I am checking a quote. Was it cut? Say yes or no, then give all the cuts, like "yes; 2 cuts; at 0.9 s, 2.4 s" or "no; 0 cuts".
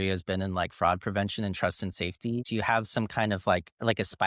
yes; 1 cut; at 2.4 s